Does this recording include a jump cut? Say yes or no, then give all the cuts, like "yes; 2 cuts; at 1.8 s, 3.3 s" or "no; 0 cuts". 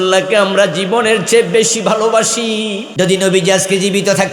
yes; 1 cut; at 2.8 s